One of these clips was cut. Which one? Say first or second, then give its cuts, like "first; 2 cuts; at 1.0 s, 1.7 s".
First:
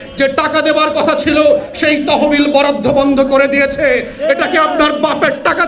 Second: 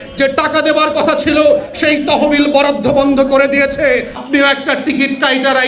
second; 1 cut; at 4.2 s